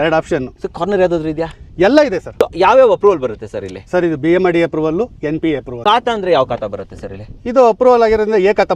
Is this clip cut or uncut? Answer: cut